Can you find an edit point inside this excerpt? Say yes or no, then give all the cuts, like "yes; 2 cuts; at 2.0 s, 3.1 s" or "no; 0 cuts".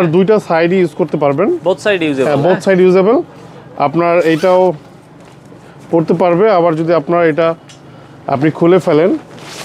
no; 0 cuts